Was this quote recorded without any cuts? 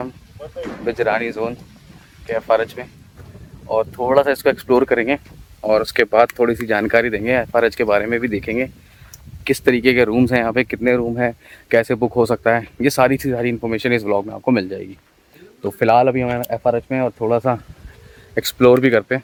yes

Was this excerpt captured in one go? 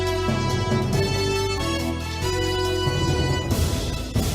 no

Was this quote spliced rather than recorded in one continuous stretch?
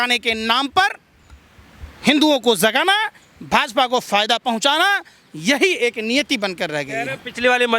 no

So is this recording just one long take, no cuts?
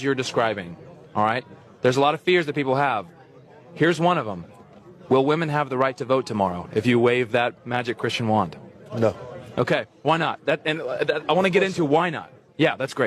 no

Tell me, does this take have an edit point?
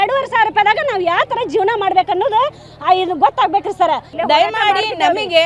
yes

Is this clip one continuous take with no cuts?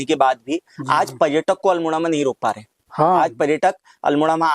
yes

